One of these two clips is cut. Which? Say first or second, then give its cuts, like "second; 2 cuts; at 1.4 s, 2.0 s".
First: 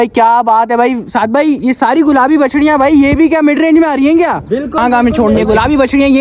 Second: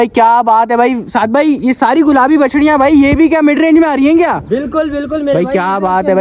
first; 1 cut; at 4.8 s